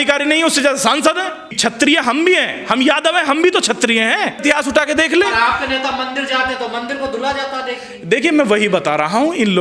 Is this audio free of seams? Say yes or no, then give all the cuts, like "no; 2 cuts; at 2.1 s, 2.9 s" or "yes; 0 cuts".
no; 2 cuts; at 1.5 s, 4.4 s